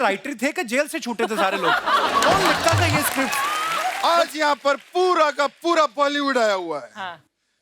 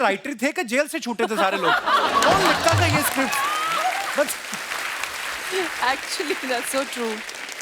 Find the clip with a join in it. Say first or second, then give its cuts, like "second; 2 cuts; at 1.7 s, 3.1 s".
first; 1 cut; at 4.0 s